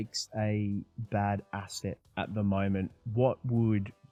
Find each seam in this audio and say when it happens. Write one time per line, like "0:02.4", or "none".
none